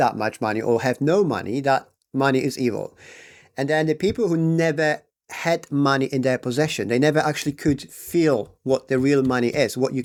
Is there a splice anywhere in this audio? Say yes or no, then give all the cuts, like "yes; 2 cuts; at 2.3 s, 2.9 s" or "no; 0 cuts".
no; 0 cuts